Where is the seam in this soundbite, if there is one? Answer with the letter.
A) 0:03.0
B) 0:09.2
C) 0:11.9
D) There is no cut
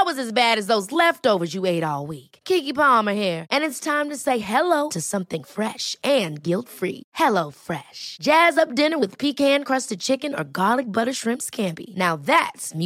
D